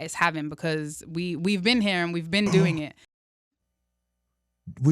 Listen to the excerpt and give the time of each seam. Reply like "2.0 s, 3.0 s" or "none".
3.3 s

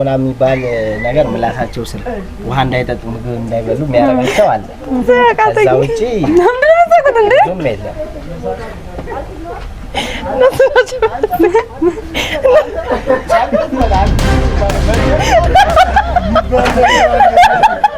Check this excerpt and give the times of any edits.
none

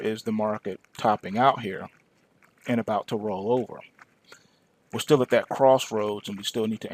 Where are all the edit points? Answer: 1.4 s

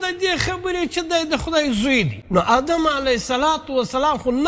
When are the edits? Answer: 2.2 s

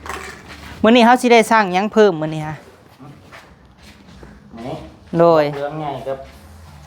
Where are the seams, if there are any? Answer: none

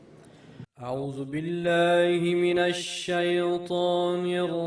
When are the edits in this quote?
1.9 s

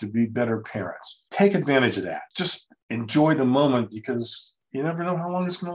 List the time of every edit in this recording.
1.2 s, 2.3 s

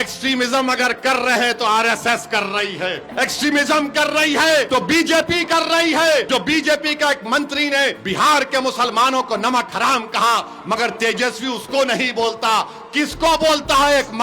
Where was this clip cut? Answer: 3.1 s, 4.7 s, 6.3 s, 8.0 s

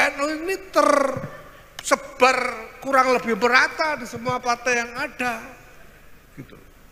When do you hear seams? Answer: none

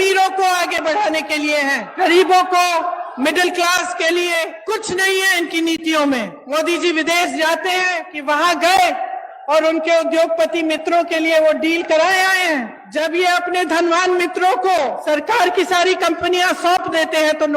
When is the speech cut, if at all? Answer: 1.9 s, 4.6 s, 6.4 s, 8.1 s, 12.9 s, 15.0 s

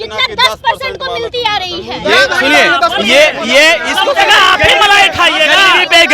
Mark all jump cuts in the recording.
none

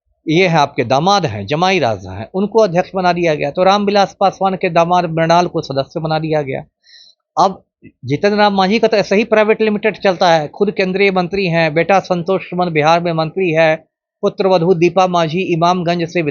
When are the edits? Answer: none

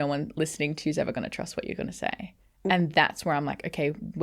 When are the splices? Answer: none

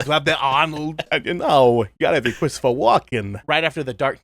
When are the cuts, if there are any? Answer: 1.1 s, 3.4 s

